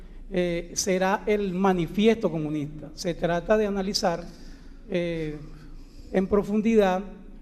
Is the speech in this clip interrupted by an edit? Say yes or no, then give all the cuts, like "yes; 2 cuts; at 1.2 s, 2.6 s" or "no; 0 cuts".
yes; 1 cut; at 6.1 s